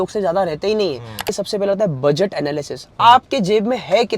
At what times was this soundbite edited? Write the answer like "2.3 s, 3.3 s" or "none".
1.3 s